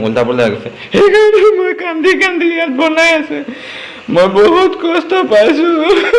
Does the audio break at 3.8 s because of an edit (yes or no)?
no